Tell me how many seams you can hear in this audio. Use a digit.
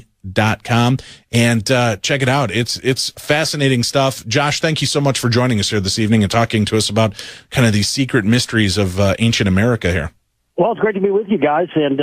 1